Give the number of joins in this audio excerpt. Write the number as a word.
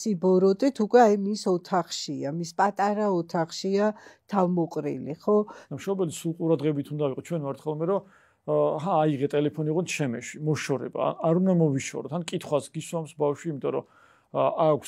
zero